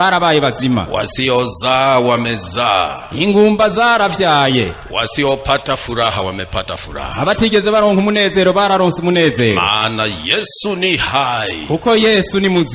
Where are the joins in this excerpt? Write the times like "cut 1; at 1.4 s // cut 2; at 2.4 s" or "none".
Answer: none